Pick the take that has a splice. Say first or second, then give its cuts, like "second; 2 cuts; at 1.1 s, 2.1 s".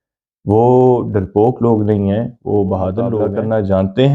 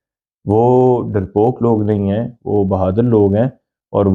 first; 1 cut; at 3.2 s